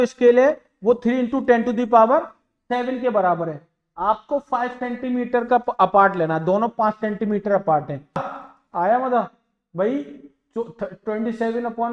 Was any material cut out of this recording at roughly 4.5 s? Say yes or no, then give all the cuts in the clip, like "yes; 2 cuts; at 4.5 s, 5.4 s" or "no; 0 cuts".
no; 1 cut; at 8.3 s